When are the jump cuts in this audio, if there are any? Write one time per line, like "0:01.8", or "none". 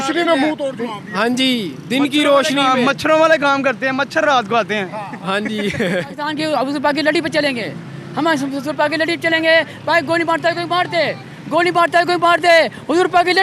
0:06.2